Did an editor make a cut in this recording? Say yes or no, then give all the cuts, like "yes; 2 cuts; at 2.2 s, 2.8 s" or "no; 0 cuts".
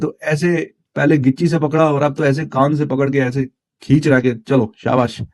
no; 0 cuts